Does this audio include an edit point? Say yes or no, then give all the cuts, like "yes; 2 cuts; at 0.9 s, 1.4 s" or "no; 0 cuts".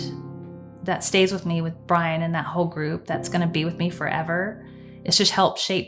no; 0 cuts